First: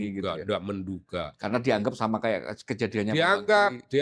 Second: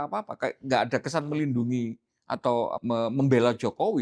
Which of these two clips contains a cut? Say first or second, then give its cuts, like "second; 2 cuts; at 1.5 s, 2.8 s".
second; 1 cut; at 2.8 s